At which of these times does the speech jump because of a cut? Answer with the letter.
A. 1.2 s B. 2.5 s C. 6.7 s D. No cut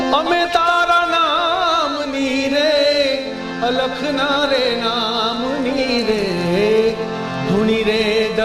D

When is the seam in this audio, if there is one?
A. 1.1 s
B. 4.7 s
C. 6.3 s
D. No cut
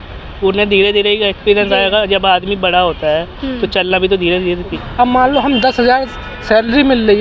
B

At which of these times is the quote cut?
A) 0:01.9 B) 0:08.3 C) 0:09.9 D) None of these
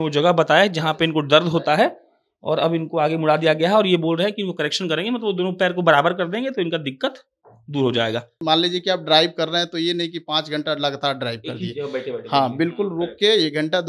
B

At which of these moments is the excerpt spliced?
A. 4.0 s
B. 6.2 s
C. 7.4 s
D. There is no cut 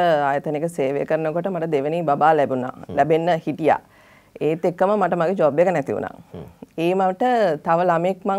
D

